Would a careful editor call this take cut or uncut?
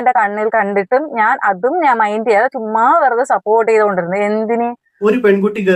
cut